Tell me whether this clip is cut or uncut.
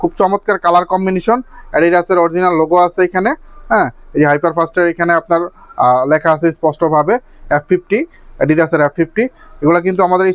uncut